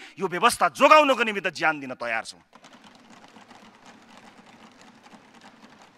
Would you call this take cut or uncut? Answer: uncut